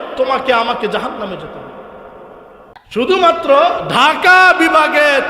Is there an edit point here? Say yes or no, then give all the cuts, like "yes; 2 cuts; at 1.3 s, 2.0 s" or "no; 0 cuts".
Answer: yes; 1 cut; at 2.8 s